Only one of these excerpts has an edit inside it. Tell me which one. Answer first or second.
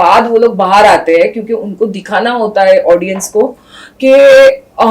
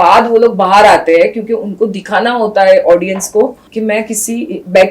second